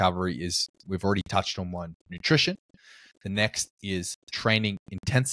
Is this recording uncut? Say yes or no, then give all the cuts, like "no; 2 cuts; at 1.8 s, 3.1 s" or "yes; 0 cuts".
yes; 0 cuts